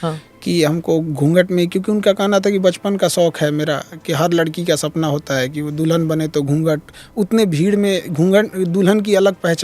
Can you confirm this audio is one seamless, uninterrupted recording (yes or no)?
yes